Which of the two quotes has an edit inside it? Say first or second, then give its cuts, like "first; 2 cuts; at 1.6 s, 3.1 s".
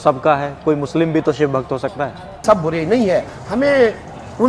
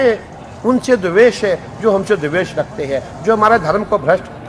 first; 1 cut; at 2.4 s